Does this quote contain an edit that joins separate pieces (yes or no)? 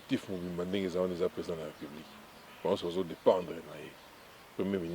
no